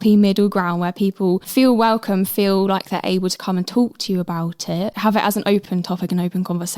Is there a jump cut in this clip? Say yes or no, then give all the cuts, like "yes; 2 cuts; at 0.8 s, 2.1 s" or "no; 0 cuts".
yes; 3 cuts; at 1.5 s, 4.9 s, 5.7 s